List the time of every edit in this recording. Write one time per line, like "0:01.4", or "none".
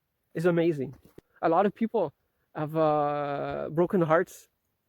0:01.1